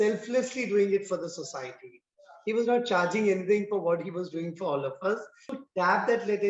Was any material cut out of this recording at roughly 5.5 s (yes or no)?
yes